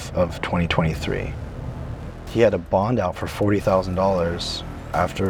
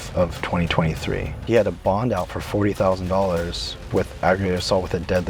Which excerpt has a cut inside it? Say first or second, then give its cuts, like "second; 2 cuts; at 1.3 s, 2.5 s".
second; 2 cuts; at 1.3 s, 3.8 s